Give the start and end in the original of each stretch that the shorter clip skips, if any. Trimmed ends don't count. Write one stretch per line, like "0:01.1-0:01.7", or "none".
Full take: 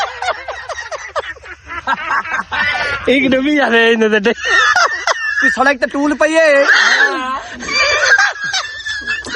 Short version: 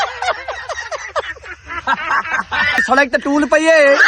0:02.8-0:05.5

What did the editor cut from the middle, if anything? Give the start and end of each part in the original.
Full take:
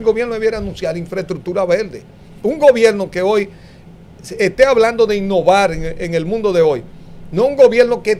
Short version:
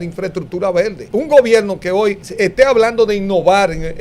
0:01.9-0:02.3
0:03.6-0:04.3

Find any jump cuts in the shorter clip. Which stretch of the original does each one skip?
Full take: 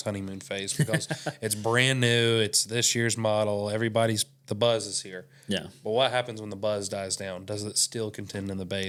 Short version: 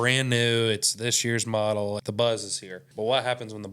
0:03.7-0:04.4
0:05.3-0:05.7

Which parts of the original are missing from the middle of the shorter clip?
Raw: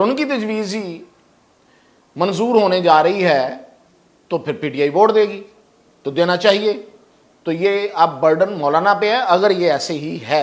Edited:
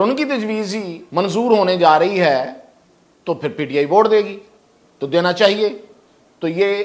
0:01.0-0:02.0

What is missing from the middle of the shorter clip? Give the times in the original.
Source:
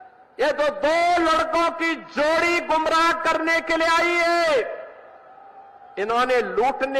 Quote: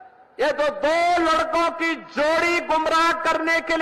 none

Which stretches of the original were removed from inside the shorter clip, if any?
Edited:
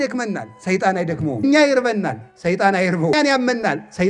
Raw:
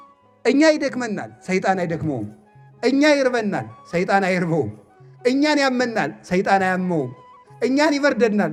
0:02.2-0:02.9
0:04.6-0:05.5

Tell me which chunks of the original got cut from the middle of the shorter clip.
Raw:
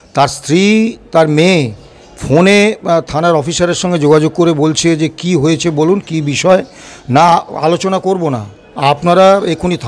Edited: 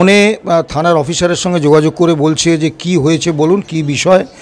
none

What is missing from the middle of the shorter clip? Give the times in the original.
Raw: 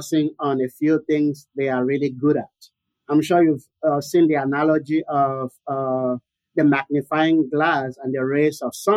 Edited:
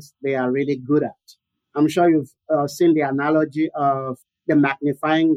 0:05.6-0:06.3

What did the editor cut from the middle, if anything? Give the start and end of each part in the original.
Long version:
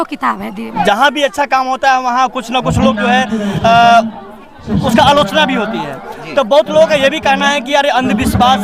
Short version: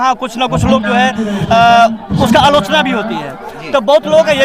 0:04.2-0:04.7

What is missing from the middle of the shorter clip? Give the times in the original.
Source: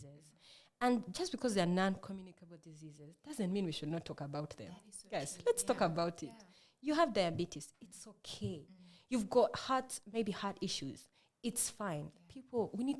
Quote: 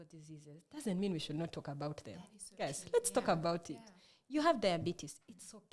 none

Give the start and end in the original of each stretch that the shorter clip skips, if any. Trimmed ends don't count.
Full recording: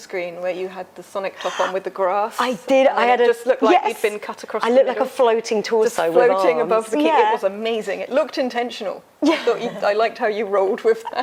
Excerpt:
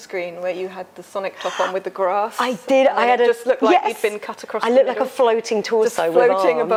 none

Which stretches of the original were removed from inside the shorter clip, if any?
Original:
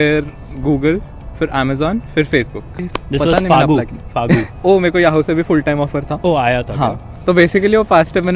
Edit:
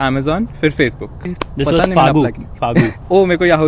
none

